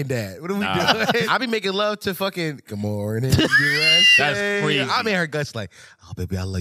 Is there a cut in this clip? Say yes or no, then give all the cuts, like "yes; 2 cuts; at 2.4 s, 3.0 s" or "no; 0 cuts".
yes; 2 cuts; at 1.3 s, 4.9 s